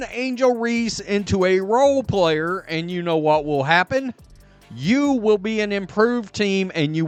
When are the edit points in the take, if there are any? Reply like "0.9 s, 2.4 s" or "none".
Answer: none